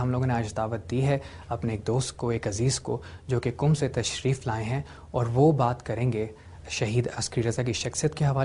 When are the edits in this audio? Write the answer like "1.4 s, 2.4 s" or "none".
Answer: 6.9 s